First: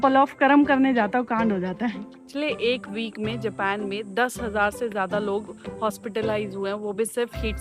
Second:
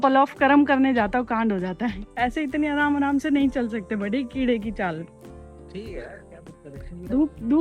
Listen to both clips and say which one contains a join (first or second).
first